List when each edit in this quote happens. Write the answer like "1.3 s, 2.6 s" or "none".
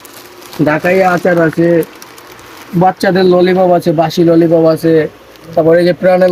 none